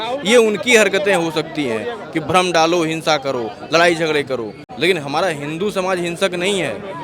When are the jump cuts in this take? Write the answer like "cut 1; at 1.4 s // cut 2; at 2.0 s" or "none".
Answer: cut 1; at 4.6 s